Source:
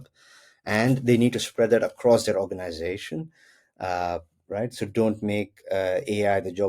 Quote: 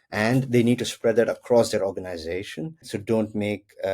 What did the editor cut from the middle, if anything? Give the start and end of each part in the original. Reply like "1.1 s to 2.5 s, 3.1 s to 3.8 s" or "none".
3.5 s to 4.8 s